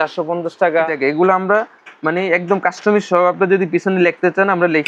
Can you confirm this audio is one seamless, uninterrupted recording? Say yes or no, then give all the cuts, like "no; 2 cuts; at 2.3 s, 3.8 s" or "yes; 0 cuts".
no; 1 cut; at 0.9 s